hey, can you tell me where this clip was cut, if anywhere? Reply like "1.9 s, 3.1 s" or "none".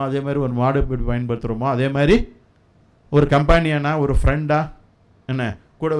none